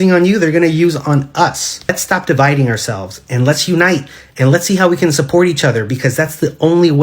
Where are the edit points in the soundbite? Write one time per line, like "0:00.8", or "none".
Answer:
0:01.9

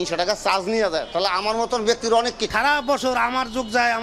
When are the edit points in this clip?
0:02.5

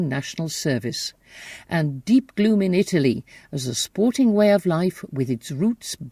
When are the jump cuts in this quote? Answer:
0:04.3

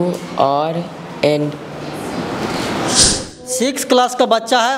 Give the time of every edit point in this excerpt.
0:03.1

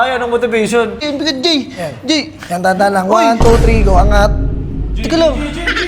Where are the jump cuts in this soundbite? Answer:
0:00.9

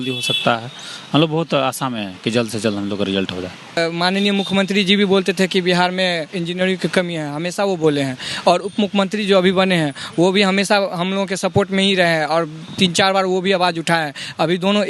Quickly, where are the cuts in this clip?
0:03.8

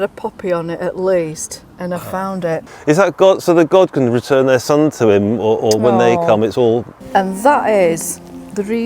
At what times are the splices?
0:02.7
0:06.9

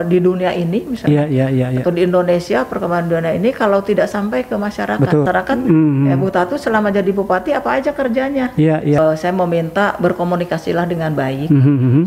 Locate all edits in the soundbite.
0:05.3
0:09.0

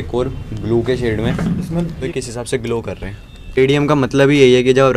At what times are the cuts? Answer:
0:02.0
0:03.6

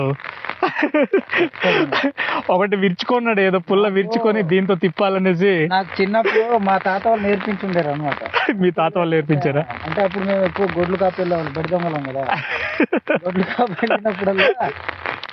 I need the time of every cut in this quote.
none

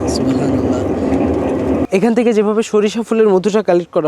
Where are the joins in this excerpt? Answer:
0:01.8

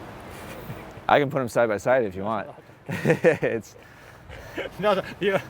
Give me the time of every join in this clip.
none

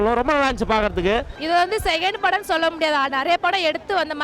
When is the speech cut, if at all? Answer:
0:01.3

